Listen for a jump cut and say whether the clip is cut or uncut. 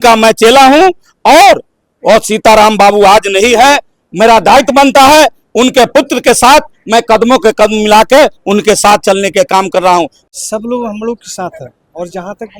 cut